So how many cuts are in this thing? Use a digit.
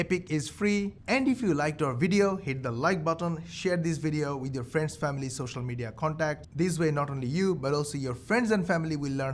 1